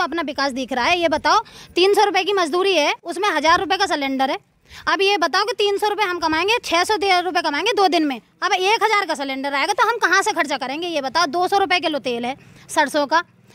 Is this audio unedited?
yes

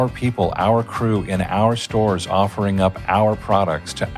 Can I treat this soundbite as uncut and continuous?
yes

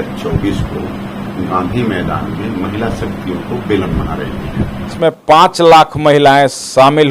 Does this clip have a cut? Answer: yes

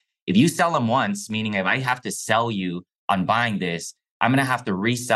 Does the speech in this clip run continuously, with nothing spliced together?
yes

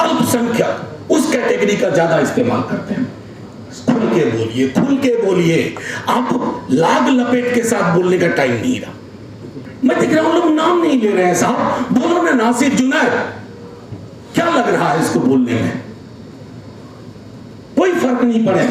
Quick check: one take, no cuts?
no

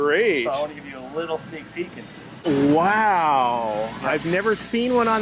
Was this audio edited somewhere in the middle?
yes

